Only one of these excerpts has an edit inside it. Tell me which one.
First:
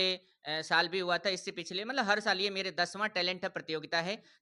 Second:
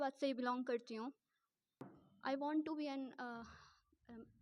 second; 1 cut; at 2.0 s

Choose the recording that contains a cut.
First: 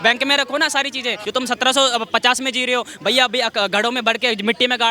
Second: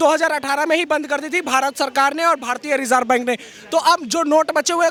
first; 1 cut; at 1.2 s

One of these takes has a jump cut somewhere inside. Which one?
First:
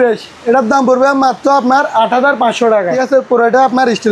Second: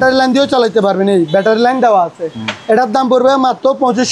first; 1 cut; at 3.0 s

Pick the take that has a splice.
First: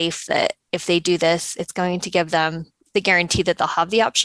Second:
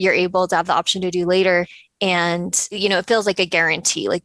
second; 2 cuts; at 1.8 s, 2.8 s

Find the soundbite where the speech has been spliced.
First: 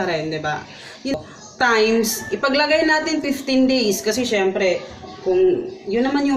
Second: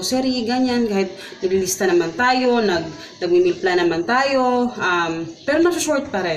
first; 1 cut; at 1.1 s

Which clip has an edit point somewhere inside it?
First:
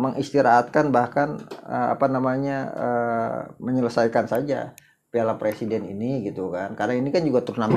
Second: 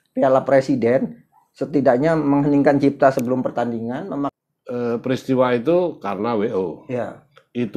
second; 1 cut; at 4.3 s

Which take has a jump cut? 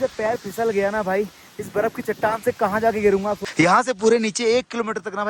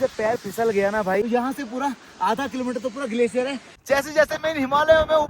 second; 2 cuts; at 1.1 s, 3.7 s

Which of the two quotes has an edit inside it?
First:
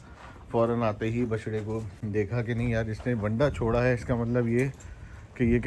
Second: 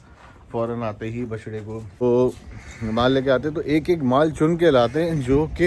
second; 1 cut; at 2.0 s

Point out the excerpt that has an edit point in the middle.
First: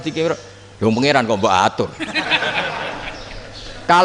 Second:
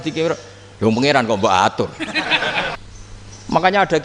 second; 1 cut; at 2.8 s

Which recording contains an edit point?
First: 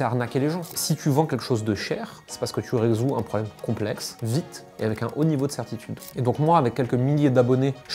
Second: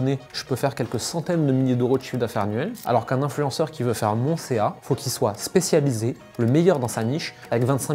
first; 1 cut; at 6.1 s

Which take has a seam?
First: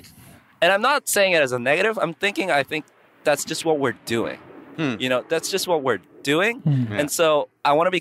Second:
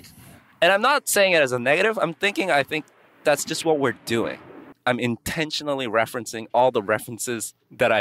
second; 1 cut; at 4.6 s

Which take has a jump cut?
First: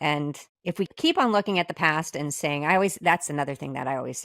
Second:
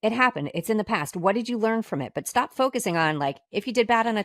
first; 1 cut; at 0.9 s

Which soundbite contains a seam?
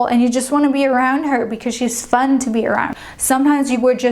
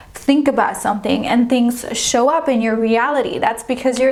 first; 1 cut; at 3.0 s

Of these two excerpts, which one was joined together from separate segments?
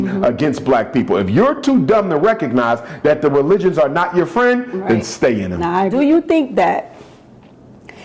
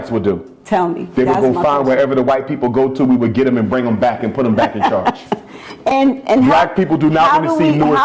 first; 1 cut; at 5.9 s

